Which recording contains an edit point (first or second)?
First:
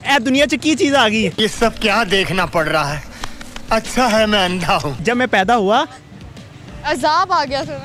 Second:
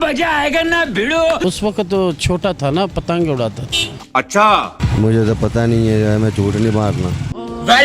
second